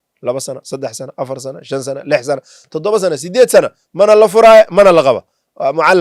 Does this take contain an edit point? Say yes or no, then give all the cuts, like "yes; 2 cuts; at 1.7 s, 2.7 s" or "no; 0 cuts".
no; 0 cuts